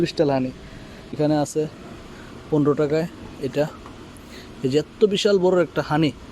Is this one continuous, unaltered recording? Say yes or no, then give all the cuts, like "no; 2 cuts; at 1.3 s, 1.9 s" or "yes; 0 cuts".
no; 1 cut; at 1.2 s